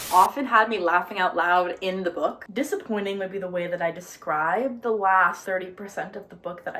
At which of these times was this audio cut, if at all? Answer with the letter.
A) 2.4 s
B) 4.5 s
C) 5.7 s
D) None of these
A